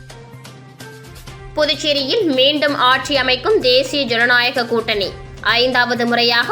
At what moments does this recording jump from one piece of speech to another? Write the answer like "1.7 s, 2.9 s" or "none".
1.0 s